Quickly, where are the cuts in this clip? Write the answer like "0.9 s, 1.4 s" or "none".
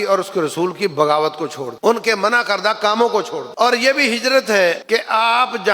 1.7 s, 3.4 s, 4.8 s